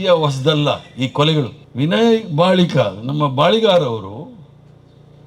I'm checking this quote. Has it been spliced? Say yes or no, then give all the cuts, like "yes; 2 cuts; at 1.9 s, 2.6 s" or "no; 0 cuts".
yes; 1 cut; at 1.6 s